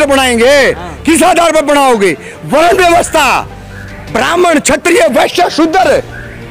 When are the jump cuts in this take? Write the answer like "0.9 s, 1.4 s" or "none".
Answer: none